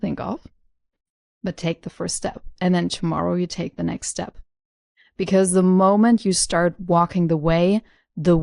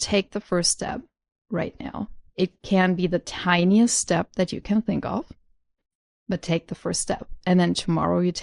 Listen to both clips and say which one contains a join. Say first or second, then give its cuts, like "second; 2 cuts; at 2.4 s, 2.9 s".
second; 1 cut; at 2.2 s